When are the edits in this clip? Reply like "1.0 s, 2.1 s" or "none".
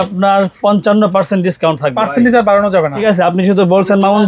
2.0 s, 3.0 s